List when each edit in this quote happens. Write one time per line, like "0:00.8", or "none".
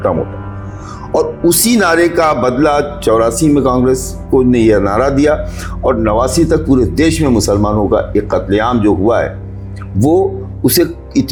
none